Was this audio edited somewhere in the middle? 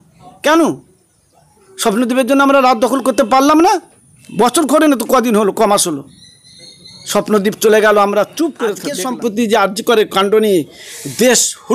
yes; 1 cut; at 8.8 s

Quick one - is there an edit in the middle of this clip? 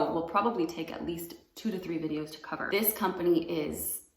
yes; 1 cut; at 2.7 s

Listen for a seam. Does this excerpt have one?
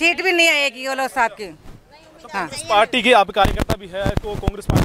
no; 0 cuts

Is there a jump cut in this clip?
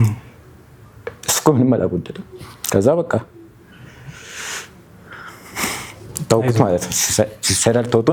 no; 0 cuts

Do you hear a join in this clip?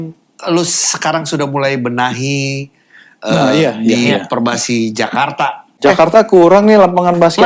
yes; 1 cut; at 5.7 s

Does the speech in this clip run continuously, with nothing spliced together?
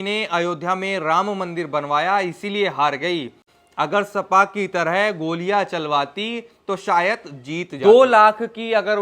no; 1 cut; at 7.9 s

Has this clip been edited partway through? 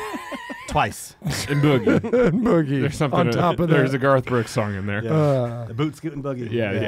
no; 0 cuts

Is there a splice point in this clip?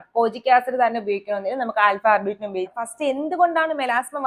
yes; 1 cut; at 2.8 s

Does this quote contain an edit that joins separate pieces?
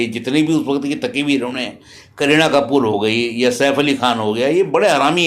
no; 0 cuts

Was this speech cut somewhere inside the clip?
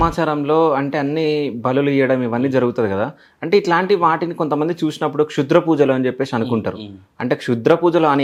no; 0 cuts

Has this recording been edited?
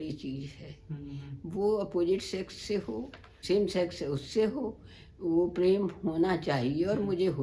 yes; 1 cut; at 3.3 s

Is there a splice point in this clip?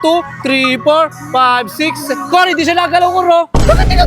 no; 0 cuts

